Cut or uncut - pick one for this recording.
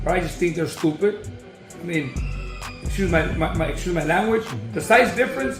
uncut